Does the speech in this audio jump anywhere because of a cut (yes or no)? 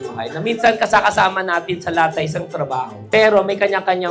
no